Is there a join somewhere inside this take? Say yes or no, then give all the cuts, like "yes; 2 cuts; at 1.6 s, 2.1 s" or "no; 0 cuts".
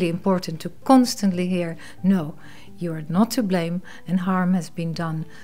no; 0 cuts